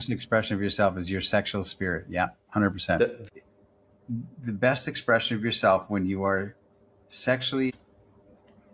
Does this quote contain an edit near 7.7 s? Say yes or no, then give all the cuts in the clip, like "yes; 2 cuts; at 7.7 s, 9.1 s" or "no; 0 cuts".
yes; 2 cuts; at 3.3 s, 7.7 s